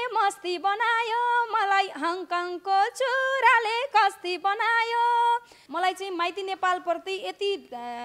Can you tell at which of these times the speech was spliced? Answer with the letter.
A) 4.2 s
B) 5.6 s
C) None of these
B